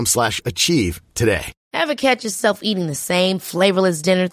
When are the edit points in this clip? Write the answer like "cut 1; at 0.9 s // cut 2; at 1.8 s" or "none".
cut 1; at 1.6 s